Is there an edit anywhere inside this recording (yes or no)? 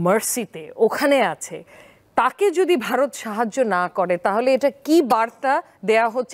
no